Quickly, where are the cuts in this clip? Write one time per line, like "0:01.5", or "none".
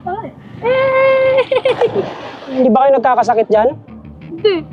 0:02.5